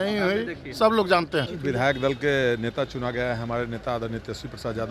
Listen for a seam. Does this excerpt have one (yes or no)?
no